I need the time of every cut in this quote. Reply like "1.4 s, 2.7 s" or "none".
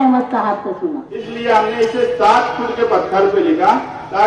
1.1 s

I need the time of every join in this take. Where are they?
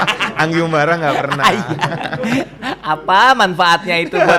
none

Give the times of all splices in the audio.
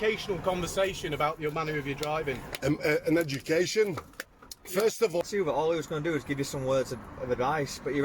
5.2 s

